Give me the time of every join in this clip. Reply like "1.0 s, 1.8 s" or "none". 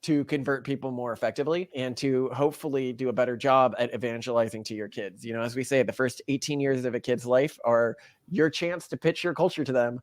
1.7 s